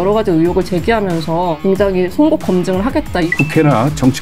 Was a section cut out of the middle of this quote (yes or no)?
yes